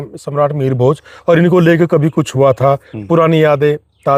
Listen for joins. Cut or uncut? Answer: uncut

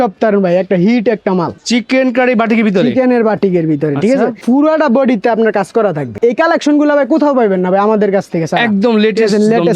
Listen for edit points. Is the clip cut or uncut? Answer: cut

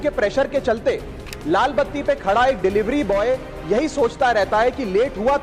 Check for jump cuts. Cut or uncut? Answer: uncut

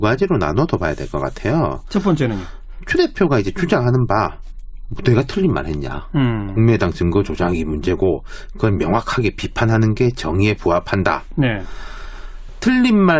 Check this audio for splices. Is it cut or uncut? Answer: uncut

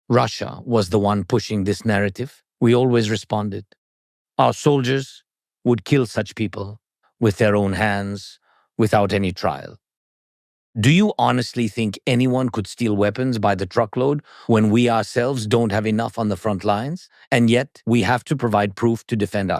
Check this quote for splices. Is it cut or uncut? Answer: uncut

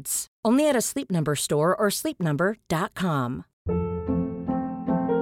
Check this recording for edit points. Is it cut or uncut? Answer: cut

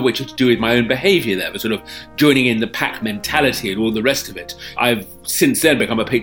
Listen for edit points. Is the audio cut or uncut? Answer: cut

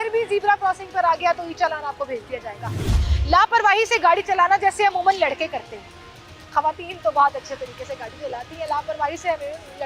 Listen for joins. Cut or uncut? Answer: cut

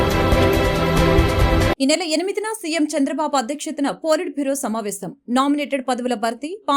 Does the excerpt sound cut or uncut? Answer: cut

